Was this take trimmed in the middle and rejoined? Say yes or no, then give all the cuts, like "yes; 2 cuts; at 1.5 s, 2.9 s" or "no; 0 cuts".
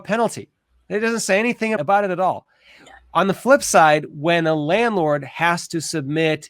yes; 1 cut; at 1.8 s